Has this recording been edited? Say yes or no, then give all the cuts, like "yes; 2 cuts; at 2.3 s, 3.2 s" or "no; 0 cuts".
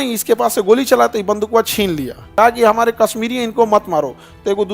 yes; 1 cut; at 2.3 s